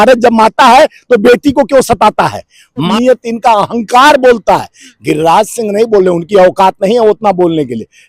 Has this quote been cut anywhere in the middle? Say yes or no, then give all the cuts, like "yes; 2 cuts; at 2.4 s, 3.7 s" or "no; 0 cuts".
yes; 1 cut; at 2.9 s